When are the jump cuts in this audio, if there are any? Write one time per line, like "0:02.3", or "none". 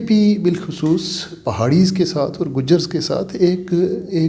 none